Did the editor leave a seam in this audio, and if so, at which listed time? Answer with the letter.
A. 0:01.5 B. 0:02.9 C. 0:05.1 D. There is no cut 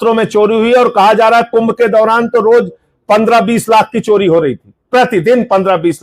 D